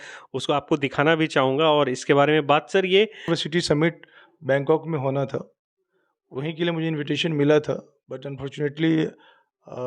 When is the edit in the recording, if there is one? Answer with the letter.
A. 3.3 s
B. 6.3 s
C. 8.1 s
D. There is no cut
A